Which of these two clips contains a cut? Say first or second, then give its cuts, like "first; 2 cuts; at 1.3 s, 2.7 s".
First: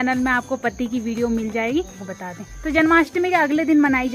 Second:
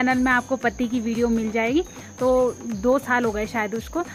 first; 1 cut; at 2.0 s